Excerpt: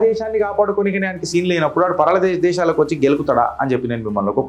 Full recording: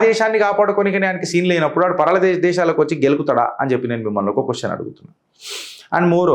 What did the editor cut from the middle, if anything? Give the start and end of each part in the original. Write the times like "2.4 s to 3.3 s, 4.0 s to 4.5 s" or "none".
none